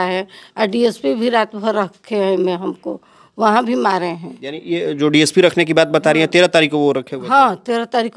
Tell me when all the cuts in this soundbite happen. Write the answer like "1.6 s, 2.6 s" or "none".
none